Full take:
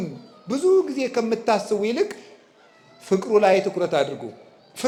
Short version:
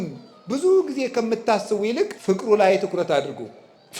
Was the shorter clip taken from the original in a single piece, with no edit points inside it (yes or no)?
no